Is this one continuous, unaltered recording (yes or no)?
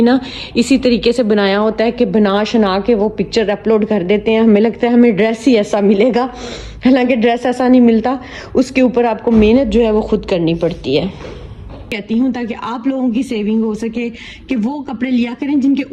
no